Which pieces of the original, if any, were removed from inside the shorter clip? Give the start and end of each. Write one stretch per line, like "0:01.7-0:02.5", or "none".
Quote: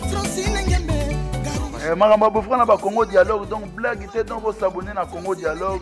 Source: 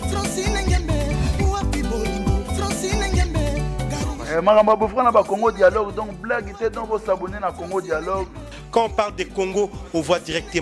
0:01.0-0:03.4